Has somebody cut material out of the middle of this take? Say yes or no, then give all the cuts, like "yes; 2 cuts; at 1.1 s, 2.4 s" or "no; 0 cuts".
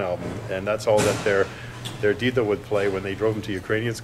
no; 0 cuts